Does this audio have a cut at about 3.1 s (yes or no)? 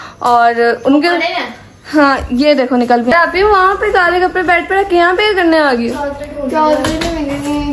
yes